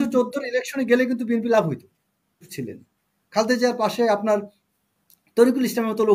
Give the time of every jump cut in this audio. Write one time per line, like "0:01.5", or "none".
0:02.5